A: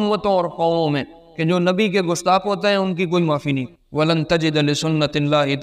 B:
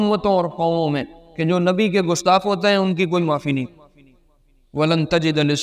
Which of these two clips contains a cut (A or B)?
A